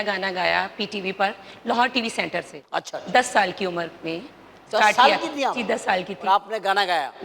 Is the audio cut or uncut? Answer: uncut